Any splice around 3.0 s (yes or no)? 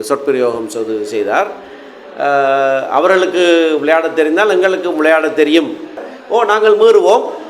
no